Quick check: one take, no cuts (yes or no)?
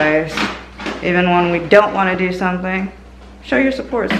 yes